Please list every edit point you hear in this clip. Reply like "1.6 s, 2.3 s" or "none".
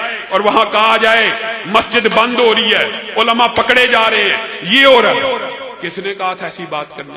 none